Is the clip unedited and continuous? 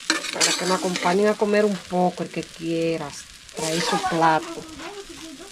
yes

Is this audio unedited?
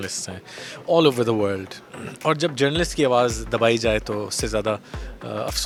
yes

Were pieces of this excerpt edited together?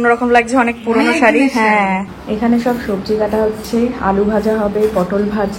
yes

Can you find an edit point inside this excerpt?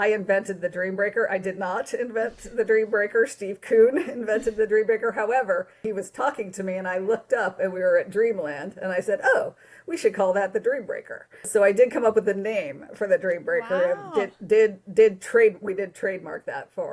yes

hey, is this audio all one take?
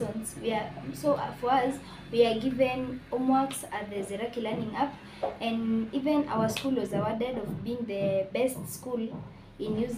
yes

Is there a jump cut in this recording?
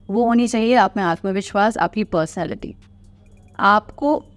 no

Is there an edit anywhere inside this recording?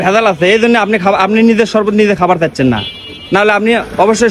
no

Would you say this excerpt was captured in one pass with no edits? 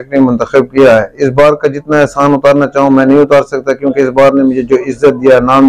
yes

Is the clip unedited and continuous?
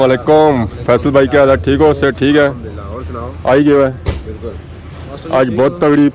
yes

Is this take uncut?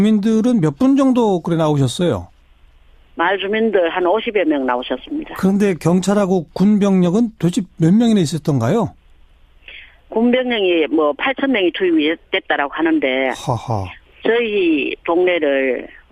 no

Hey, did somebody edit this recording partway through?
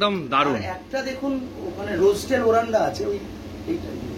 no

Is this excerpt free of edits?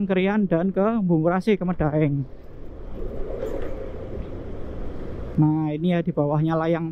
no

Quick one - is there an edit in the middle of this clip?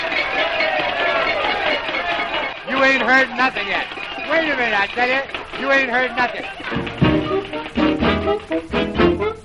yes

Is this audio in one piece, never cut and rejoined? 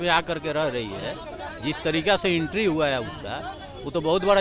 yes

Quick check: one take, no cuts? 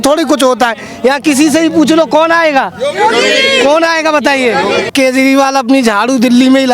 no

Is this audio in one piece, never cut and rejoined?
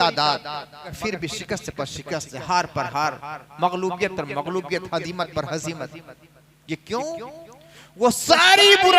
no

